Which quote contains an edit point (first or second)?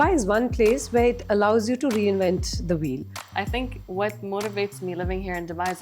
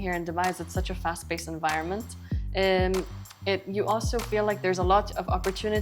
first